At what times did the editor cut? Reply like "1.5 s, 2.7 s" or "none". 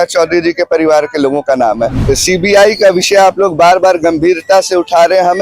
1.9 s